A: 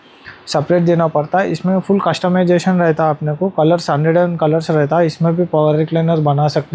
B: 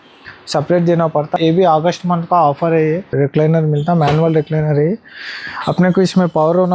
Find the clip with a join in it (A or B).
B